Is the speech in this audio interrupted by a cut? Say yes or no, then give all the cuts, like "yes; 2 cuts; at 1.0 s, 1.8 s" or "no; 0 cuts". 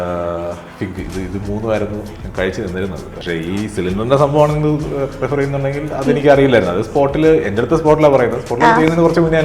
yes; 2 cuts; at 2.2 s, 3.1 s